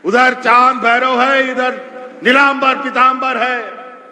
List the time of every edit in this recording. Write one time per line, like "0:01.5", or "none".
none